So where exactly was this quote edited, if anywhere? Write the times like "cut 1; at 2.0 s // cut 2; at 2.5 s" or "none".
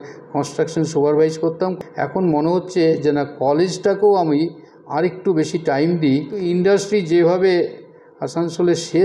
cut 1; at 1.8 s // cut 2; at 6.4 s